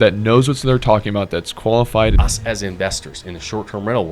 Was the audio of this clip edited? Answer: yes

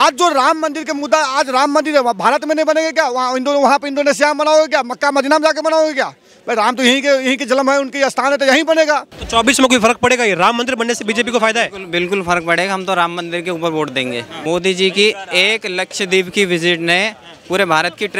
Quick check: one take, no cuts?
no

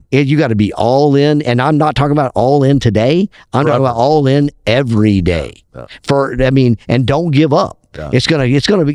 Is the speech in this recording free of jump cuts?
yes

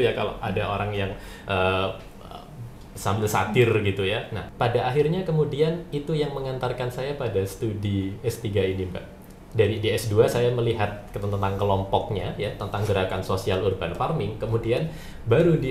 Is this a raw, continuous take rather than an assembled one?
no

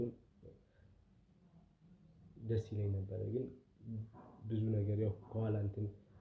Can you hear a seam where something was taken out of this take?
no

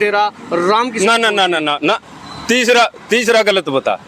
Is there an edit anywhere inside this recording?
no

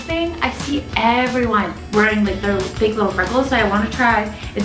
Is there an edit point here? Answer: no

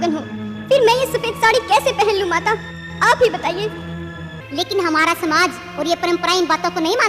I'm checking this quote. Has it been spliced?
yes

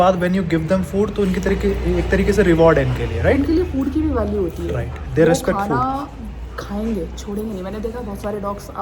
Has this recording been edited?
no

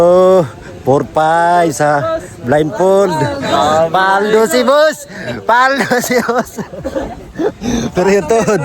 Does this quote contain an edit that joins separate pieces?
no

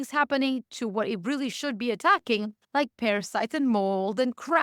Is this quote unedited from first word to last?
yes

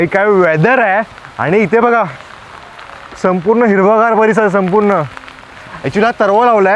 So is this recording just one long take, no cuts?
yes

